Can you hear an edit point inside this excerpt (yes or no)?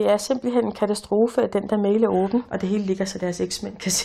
yes